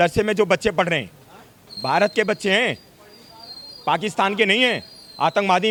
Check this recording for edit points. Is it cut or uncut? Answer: uncut